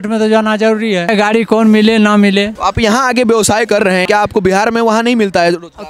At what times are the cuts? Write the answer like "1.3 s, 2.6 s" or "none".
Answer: 1.1 s, 2.5 s, 4.0 s